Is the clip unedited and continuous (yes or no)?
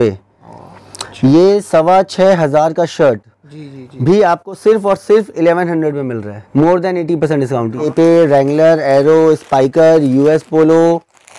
no